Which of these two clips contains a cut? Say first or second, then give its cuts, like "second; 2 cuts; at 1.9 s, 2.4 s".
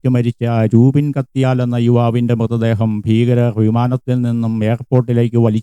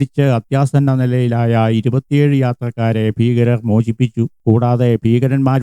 second; 1 cut; at 4.3 s